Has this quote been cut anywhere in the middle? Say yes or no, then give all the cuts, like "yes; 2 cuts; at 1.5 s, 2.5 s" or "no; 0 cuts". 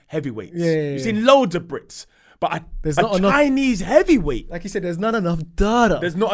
no; 0 cuts